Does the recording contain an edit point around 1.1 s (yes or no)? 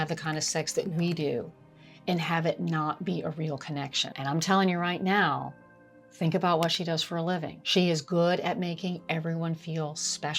no